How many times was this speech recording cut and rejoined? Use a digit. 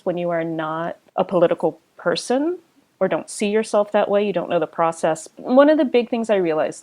2